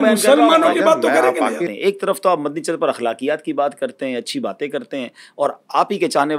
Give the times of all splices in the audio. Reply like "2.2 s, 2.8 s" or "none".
1.7 s